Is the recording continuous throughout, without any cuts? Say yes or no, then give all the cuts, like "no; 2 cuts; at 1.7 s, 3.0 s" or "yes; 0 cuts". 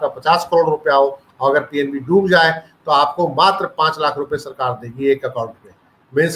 yes; 0 cuts